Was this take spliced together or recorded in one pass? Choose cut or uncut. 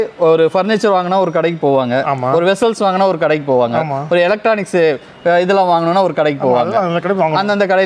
uncut